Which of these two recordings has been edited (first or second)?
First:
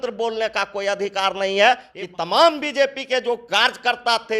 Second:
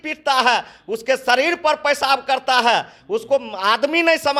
first